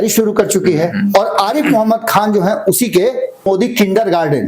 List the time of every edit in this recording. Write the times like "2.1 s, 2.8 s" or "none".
3.5 s